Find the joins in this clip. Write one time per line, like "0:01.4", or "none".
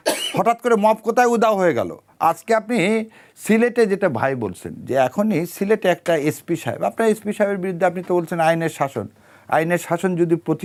none